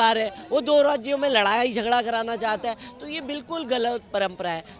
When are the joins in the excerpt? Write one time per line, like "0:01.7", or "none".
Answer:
none